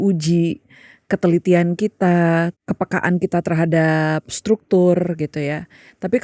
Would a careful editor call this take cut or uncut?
cut